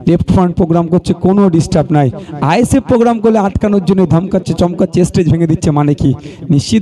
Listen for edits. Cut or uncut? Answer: uncut